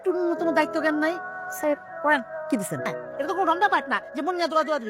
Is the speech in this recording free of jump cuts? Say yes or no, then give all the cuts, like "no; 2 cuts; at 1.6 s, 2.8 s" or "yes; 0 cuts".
no; 1 cut; at 2.9 s